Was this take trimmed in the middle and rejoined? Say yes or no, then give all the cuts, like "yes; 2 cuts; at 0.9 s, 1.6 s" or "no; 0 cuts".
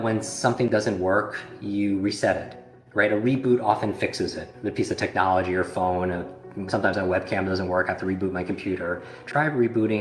no; 0 cuts